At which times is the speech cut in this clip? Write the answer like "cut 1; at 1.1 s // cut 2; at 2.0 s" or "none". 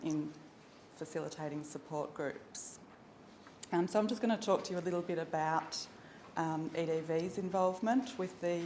cut 1; at 4.4 s